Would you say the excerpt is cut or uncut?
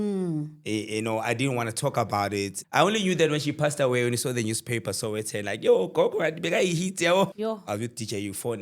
cut